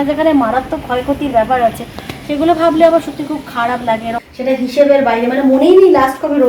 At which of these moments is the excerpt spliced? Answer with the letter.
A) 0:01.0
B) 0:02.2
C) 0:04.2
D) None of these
C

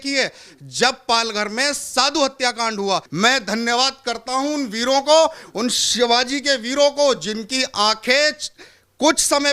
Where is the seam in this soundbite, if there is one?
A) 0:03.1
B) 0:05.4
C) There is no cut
A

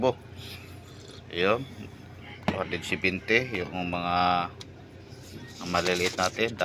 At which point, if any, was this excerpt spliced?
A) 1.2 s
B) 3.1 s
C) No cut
C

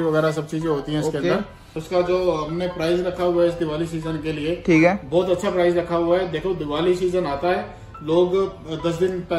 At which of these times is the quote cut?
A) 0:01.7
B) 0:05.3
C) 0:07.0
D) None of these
A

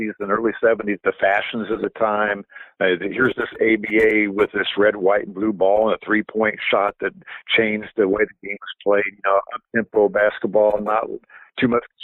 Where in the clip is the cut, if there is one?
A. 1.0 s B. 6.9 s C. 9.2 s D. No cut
A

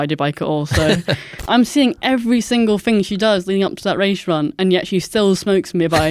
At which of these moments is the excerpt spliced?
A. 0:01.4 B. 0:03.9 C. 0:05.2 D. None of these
A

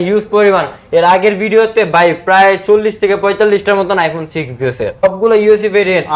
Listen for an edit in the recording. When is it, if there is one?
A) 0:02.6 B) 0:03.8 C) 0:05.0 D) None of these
C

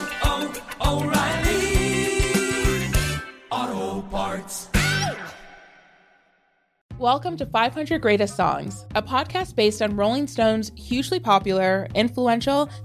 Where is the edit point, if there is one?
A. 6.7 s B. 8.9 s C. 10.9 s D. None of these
A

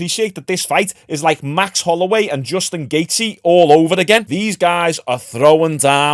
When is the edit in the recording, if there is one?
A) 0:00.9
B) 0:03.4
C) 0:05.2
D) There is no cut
D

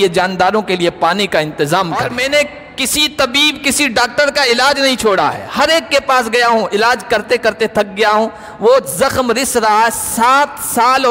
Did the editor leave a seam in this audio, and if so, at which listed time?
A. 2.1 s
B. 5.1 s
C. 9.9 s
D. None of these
A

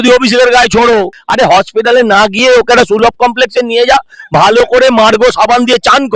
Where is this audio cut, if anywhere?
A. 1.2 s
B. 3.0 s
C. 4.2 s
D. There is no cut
A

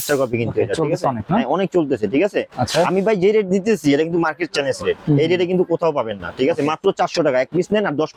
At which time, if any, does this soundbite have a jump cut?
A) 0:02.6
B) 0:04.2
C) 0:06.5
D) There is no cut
D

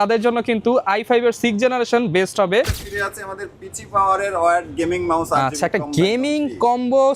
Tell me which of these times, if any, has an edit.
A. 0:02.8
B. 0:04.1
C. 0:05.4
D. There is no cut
A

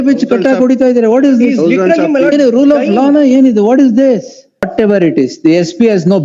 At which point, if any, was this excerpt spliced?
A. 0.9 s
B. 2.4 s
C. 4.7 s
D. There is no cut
C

